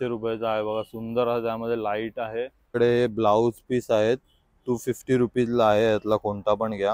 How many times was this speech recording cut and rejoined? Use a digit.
1